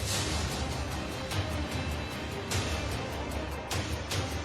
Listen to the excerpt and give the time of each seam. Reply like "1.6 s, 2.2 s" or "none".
none